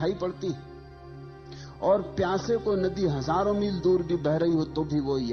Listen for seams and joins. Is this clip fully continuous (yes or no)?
yes